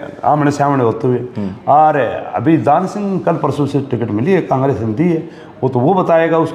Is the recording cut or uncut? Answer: uncut